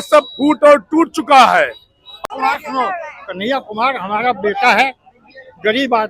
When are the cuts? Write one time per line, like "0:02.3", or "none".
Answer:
0:02.2